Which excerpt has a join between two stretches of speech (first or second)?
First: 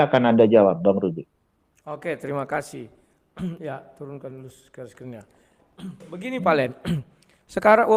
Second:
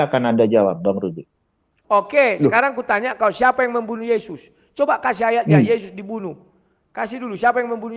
second